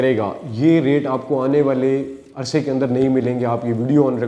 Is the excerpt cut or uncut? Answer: uncut